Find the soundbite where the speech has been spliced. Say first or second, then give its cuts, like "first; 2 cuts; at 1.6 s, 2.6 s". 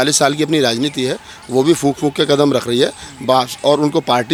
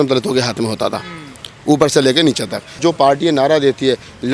second; 1 cut; at 2.8 s